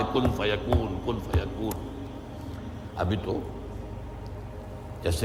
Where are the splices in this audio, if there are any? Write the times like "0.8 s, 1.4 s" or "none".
none

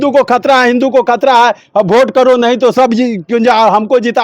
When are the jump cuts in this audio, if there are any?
none

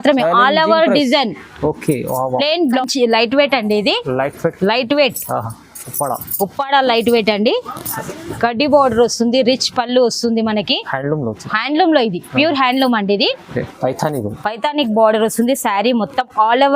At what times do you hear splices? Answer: 2.8 s, 13.7 s

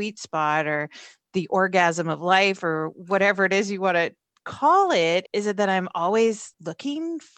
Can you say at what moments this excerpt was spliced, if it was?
none

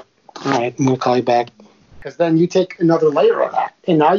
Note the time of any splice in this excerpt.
1.9 s

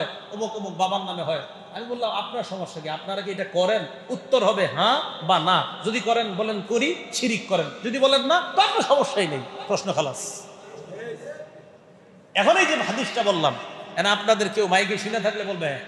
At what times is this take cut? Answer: none

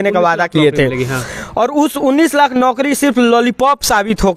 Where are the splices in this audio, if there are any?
none

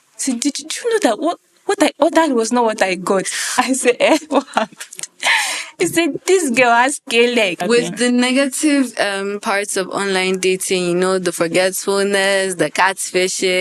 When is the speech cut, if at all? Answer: 7.6 s

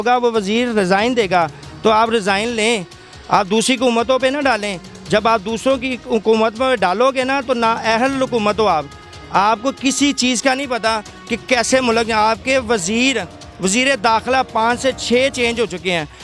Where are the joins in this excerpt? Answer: none

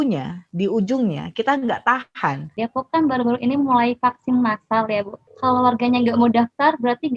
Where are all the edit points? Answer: 2.6 s, 5.2 s

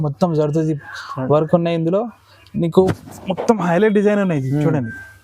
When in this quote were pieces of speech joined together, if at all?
2.9 s

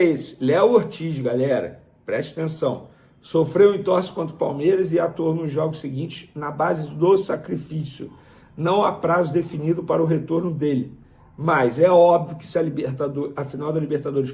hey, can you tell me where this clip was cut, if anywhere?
none

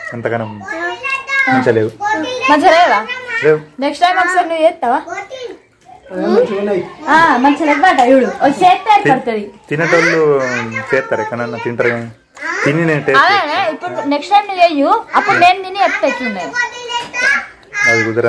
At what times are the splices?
none

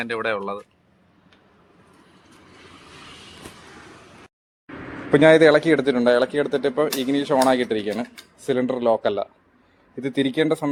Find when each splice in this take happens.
none

